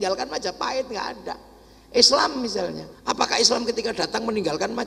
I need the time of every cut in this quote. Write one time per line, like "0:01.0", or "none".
0:02.9